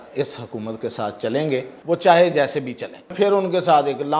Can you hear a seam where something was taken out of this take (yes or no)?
yes